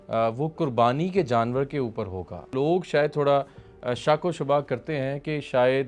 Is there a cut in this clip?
yes; 1 cut; at 2.5 s

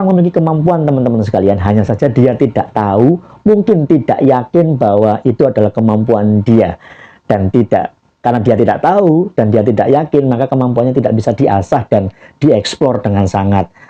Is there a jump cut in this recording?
no; 0 cuts

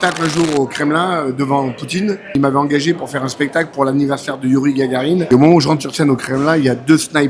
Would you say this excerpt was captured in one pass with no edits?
no; 2 cuts; at 2.3 s, 5.2 s

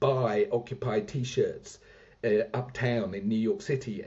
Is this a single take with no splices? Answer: yes; 0 cuts

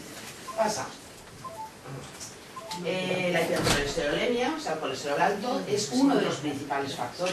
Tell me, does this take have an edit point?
yes; 1 cut; at 5.6 s

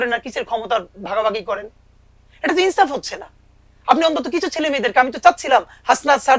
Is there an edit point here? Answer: no; 0 cuts

